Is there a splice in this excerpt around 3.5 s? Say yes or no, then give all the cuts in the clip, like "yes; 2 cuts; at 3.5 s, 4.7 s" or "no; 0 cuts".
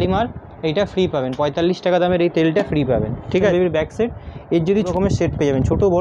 yes; 2 cuts; at 3.5 s, 4.9 s